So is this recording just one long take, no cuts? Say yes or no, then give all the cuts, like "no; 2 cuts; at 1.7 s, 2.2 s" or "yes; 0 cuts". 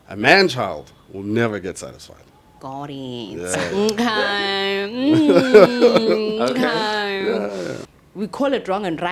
no; 1 cut; at 7.9 s